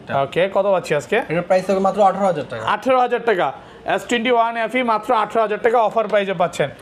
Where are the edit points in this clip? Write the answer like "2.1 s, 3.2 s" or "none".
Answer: none